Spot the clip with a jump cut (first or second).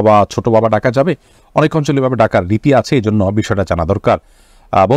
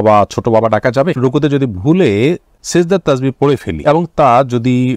second